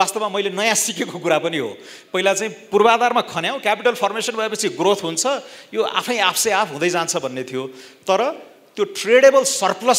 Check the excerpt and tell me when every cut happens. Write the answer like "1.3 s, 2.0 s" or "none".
none